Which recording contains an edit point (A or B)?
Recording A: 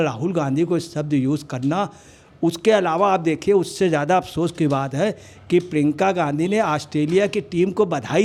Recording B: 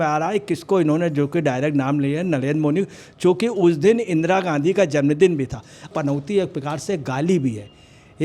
B